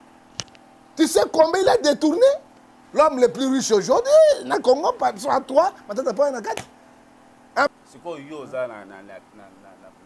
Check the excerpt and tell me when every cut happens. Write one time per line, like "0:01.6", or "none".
0:07.7